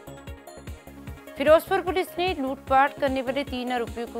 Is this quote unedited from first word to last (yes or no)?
no